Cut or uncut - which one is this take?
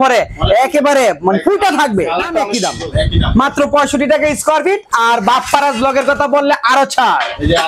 cut